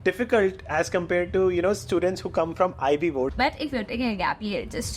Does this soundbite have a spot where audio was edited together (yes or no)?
yes